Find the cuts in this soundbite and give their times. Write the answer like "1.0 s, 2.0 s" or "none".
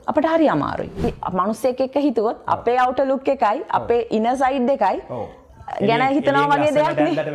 1.0 s